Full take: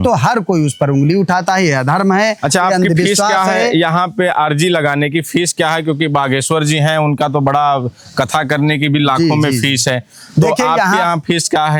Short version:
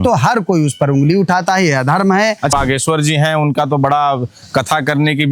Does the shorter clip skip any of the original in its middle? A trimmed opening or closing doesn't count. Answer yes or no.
yes